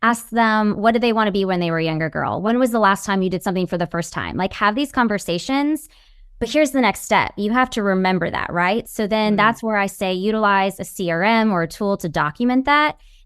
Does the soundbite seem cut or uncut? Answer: cut